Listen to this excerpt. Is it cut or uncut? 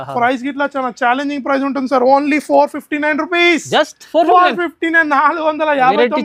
uncut